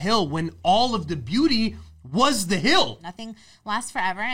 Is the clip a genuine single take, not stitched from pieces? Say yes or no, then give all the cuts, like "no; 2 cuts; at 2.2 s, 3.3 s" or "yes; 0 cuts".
no; 1 cut; at 3.1 s